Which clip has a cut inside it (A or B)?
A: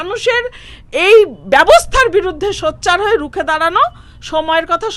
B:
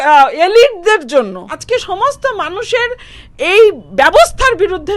B